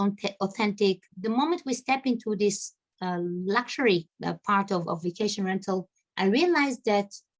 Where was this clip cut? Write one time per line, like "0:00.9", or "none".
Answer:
0:01.1
0:04.1